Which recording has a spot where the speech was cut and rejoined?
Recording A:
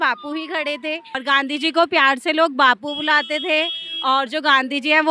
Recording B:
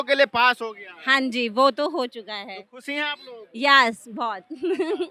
A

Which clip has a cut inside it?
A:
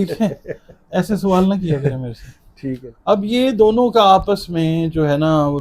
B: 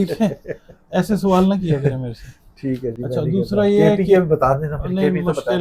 A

